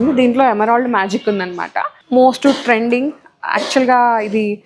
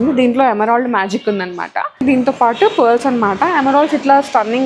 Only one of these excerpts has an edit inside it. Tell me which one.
first; 1 cut; at 1.9 s

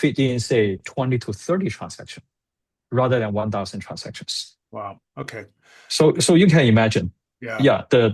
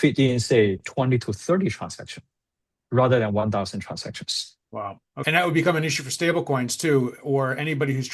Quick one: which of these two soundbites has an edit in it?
second; 1 cut; at 5.2 s

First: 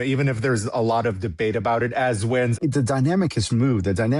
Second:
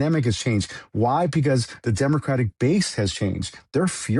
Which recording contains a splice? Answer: first; 1 cut; at 2.5 s

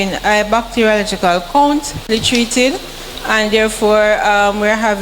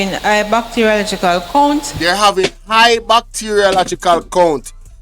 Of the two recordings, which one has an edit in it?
first; 2 cuts; at 2.0 s, 3.4 s

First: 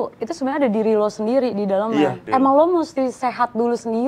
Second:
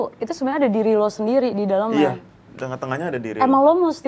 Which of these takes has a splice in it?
first; 1 cut; at 2.2 s

